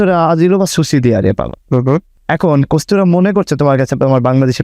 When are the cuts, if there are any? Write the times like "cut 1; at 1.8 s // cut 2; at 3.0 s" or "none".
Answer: cut 1; at 2.1 s